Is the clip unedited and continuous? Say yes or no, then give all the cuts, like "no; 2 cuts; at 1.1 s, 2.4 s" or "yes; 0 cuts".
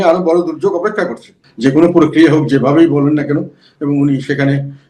no; 1 cut; at 1.4 s